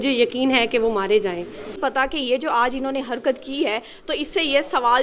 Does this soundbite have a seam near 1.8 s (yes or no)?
yes